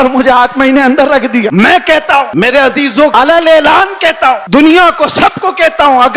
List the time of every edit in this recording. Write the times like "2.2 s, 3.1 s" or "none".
1.5 s, 2.3 s, 3.1 s, 4.4 s